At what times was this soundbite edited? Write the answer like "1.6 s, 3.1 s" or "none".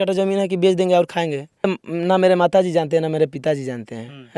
1.8 s